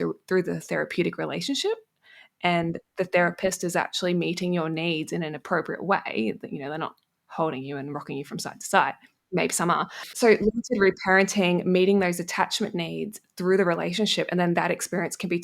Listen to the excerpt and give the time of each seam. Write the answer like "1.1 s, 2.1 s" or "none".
10.1 s